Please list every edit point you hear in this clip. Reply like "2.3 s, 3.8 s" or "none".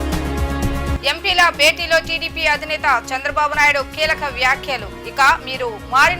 1.0 s